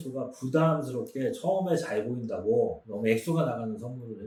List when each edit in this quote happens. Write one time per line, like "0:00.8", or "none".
none